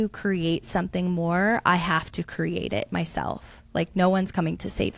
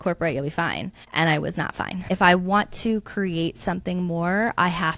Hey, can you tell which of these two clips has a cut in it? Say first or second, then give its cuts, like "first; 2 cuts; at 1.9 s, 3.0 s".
second; 2 cuts; at 1.0 s, 1.9 s